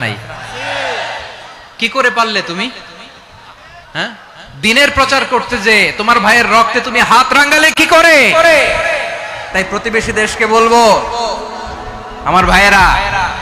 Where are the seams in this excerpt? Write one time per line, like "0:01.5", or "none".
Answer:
0:09.4